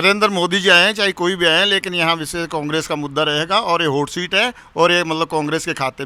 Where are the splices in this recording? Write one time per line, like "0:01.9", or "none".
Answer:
none